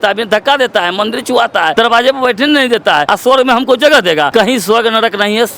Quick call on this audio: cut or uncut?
cut